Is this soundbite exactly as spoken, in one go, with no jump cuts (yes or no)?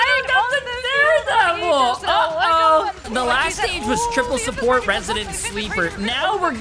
no